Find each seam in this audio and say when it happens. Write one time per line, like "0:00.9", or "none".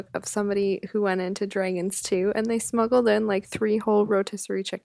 none